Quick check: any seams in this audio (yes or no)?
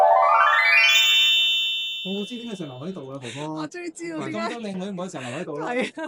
no